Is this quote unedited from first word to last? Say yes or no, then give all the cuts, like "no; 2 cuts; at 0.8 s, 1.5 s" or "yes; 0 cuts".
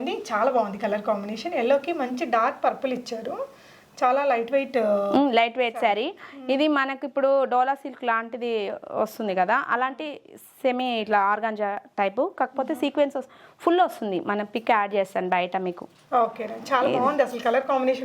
yes; 0 cuts